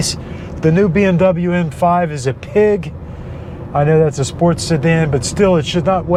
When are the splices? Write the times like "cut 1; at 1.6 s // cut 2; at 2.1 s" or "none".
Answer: none